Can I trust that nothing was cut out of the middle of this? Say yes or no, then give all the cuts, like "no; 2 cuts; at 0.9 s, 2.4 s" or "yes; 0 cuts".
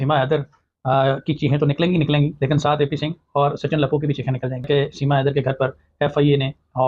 no; 1 cut; at 4.7 s